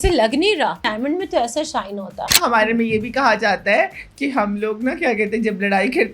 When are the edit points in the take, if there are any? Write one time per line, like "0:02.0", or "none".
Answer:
0:00.9
0:02.3

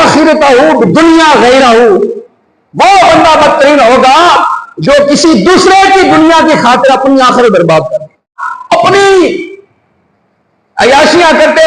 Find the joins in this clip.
0:08.5

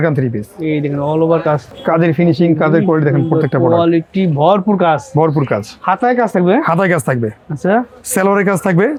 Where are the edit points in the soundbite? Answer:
none

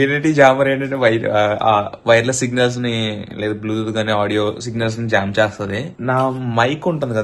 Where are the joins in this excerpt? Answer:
0:05.9

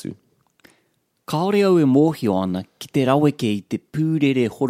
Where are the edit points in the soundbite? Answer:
none

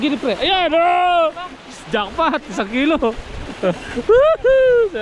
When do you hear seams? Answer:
none

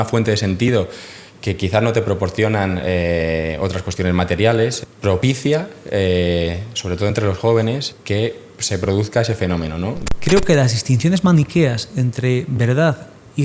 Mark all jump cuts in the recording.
0:04.8
0:07.9
0:10.0

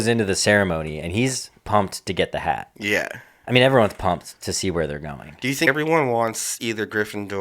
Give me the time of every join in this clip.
0:05.7

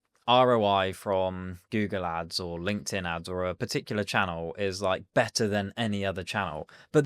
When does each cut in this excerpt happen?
none

